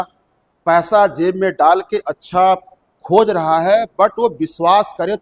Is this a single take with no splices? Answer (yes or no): yes